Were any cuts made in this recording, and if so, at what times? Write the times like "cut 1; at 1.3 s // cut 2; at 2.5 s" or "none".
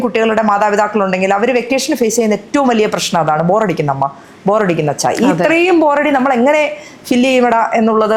none